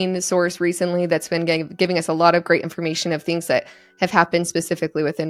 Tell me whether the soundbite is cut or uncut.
uncut